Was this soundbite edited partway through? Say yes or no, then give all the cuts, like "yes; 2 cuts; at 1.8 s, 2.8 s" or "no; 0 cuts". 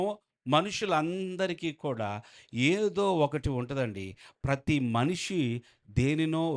no; 0 cuts